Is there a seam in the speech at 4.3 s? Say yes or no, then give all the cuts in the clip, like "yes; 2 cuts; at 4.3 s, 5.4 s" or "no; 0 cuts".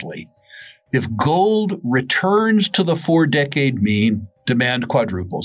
yes; 1 cut; at 4.3 s